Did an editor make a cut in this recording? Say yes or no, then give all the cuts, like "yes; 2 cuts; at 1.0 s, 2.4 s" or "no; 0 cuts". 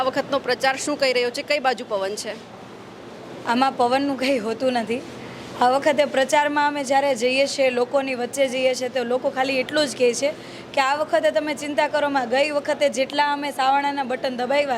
no; 0 cuts